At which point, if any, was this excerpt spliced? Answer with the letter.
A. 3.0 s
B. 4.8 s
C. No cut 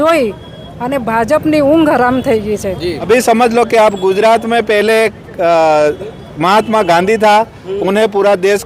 A